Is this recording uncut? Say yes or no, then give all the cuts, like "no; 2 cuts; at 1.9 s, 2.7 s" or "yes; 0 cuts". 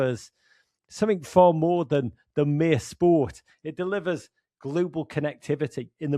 yes; 0 cuts